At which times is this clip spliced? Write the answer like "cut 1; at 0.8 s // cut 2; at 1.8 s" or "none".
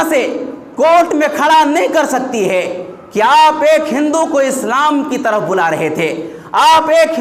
none